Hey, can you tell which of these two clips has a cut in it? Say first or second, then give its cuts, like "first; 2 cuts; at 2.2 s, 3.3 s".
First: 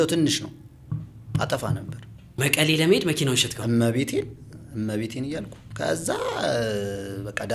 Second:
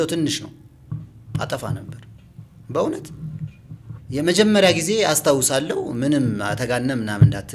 first; 1 cut; at 2.4 s